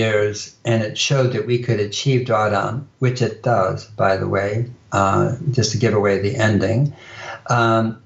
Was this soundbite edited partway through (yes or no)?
no